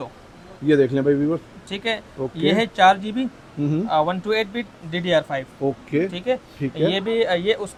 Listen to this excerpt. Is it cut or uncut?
uncut